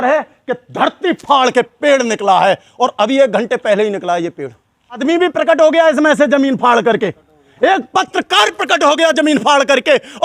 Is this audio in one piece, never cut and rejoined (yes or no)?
no